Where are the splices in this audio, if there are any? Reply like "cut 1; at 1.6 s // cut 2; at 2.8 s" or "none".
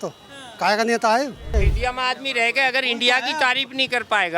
cut 1; at 1.5 s